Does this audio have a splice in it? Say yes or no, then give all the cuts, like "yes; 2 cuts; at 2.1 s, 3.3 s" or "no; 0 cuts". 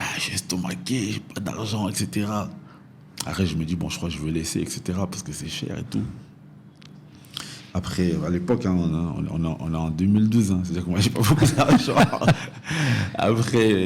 no; 0 cuts